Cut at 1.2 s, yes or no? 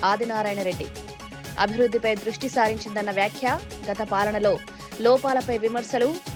no